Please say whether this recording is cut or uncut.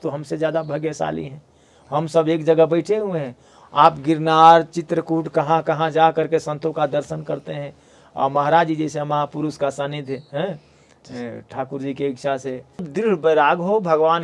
cut